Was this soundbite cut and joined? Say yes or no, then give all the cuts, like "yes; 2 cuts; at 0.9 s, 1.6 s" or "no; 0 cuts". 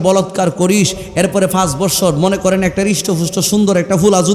no; 0 cuts